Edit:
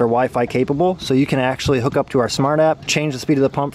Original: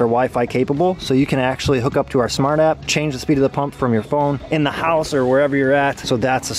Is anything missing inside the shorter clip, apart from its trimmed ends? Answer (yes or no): no